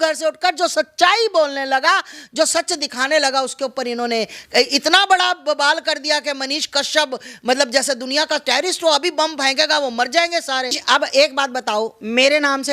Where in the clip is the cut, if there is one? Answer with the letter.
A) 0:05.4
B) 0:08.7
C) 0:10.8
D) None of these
C